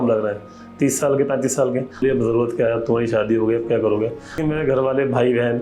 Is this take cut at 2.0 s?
yes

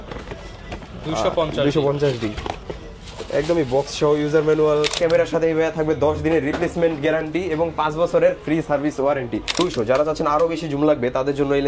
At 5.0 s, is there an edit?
yes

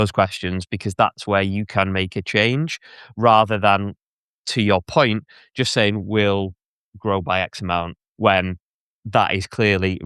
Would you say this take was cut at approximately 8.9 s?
no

